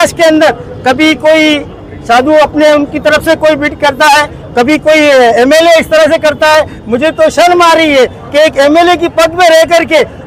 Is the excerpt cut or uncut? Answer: uncut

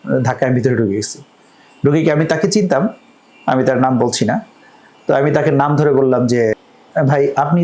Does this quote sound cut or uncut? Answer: cut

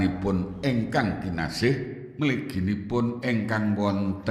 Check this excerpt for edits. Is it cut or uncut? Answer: cut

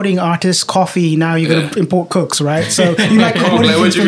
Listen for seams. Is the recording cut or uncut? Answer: uncut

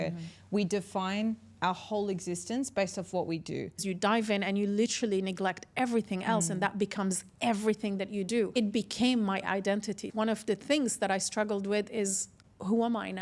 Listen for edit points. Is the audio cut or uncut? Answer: cut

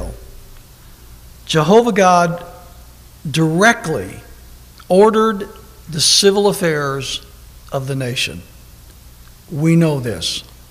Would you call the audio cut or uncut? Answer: uncut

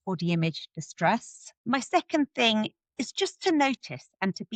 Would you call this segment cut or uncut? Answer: uncut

